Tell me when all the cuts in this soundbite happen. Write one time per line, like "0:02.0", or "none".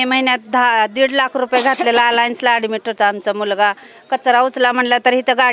none